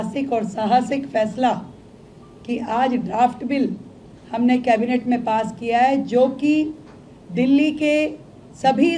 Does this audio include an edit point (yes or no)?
no